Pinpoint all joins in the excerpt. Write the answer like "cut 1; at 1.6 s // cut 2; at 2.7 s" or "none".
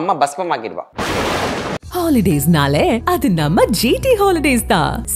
cut 1; at 1.3 s